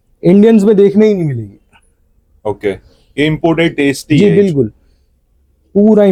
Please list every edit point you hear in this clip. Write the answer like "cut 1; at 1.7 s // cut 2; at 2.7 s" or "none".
none